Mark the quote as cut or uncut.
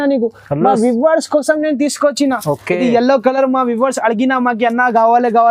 uncut